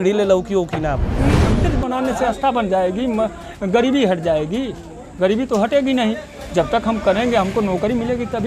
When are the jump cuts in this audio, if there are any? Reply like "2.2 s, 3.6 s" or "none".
1.4 s